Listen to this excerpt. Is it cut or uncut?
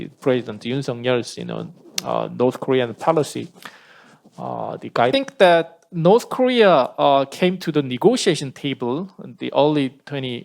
cut